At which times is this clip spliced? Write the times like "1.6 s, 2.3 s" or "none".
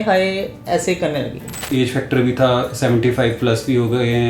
1.6 s